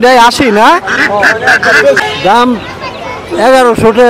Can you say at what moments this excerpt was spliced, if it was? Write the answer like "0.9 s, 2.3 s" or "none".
2.0 s